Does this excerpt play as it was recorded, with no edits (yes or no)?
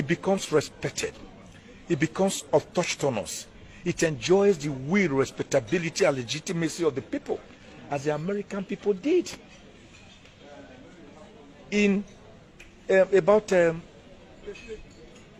yes